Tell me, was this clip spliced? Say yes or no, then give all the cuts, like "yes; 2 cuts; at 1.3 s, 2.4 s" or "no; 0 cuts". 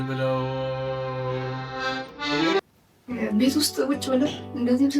yes; 1 cut; at 2.6 s